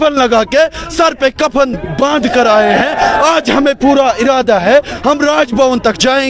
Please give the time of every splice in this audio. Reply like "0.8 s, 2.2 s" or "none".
none

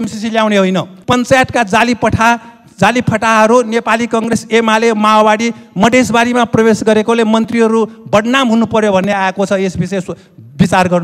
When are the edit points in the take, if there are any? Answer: 0.9 s

